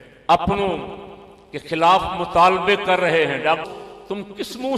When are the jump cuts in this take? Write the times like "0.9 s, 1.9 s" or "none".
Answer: 3.7 s